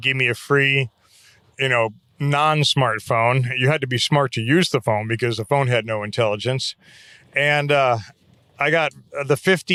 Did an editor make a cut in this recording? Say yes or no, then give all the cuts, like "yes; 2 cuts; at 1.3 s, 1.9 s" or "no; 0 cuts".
no; 0 cuts